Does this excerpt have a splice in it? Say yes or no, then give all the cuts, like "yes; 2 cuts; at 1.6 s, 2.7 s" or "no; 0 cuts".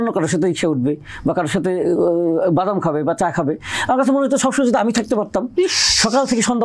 no; 0 cuts